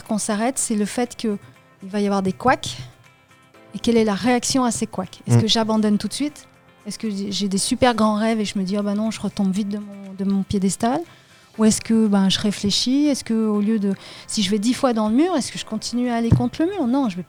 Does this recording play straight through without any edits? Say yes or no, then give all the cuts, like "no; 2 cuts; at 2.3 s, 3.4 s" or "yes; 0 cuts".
yes; 0 cuts